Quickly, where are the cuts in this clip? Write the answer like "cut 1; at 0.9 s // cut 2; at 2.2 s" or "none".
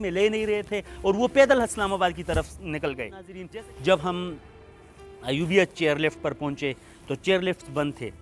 cut 1; at 3.4 s